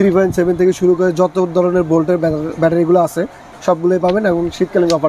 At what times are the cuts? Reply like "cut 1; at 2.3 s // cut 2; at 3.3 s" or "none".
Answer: none